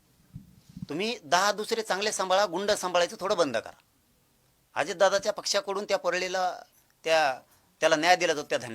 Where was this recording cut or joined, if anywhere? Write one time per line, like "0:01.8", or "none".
none